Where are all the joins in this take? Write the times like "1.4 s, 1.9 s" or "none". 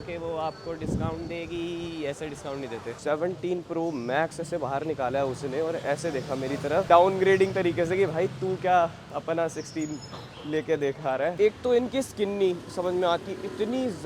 2.8 s, 11.3 s